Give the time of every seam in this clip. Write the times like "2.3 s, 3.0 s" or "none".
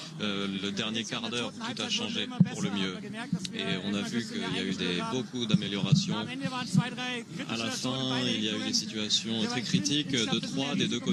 none